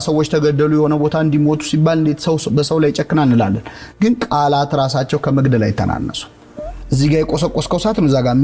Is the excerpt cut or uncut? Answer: uncut